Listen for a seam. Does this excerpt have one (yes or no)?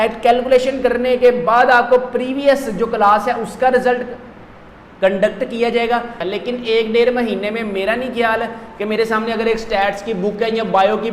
yes